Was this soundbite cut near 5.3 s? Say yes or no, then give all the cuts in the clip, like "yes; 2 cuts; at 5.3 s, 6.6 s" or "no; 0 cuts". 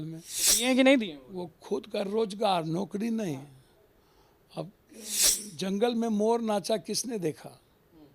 yes; 1 cut; at 5.3 s